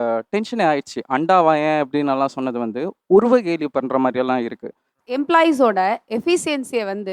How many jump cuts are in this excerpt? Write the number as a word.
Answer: one